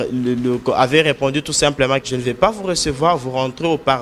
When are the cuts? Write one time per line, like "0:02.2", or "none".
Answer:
0:02.0